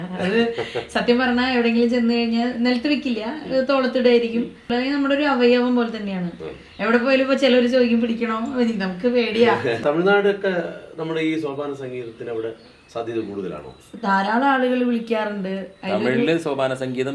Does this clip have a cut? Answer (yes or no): yes